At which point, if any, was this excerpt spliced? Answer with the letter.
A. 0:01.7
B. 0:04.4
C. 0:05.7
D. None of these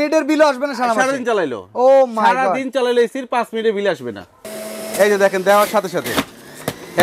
B